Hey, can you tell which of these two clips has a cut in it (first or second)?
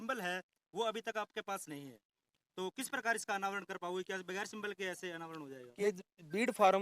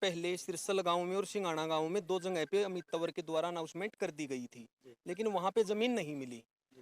first